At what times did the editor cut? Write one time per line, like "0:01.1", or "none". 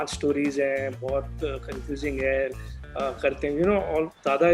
none